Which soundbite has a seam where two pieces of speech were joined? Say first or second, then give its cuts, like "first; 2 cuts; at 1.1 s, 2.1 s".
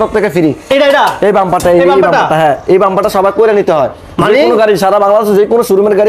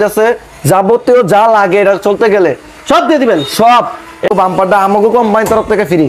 second; 1 cut; at 4.2 s